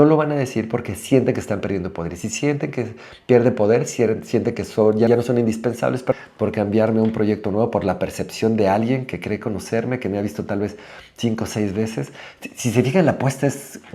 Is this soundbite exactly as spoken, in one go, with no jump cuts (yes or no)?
no